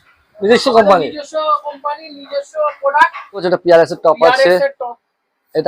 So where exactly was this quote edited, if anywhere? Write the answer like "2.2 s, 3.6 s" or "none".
3.4 s